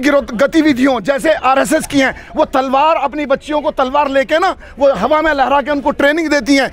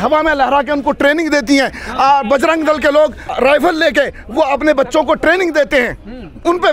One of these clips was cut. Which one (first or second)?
second